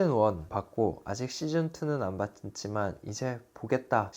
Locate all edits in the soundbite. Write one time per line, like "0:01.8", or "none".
none